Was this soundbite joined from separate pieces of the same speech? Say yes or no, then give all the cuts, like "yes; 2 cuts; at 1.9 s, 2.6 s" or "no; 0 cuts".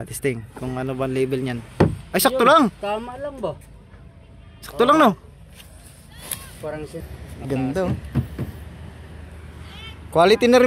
yes; 1 cut; at 7.0 s